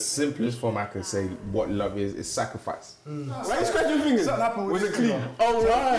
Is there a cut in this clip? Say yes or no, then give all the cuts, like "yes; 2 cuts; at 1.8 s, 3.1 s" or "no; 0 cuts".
yes; 1 cut; at 3.4 s